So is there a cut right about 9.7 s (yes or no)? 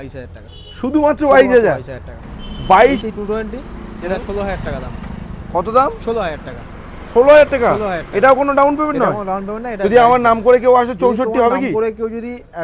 yes